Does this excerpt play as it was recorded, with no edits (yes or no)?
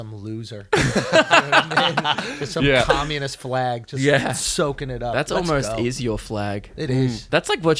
yes